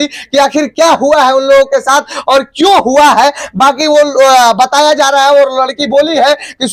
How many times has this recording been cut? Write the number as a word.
zero